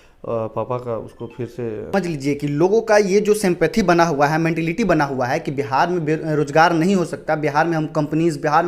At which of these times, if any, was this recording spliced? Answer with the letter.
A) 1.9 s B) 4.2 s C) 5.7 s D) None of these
A